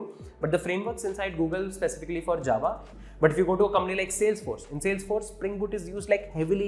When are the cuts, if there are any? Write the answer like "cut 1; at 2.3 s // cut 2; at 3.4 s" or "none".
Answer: cut 1; at 2.9 s